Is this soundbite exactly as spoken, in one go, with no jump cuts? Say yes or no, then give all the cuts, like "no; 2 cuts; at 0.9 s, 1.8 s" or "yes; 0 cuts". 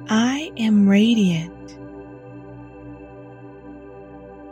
no; 1 cut; at 1.5 s